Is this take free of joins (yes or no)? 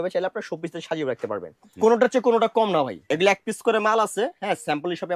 no